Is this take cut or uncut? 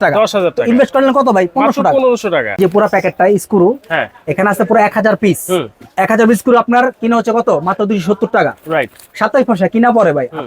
cut